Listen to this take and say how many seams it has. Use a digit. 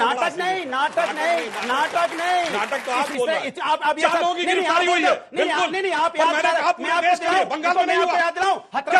1